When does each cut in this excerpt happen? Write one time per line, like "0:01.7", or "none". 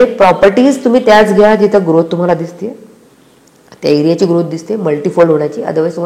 none